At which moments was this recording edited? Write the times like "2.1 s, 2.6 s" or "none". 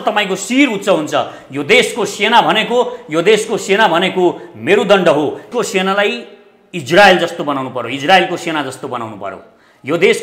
5.5 s